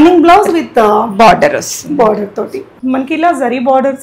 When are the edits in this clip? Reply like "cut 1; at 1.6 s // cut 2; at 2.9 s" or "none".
cut 1; at 2.7 s